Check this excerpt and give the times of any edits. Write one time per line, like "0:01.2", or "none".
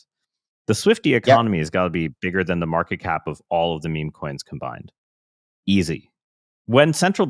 none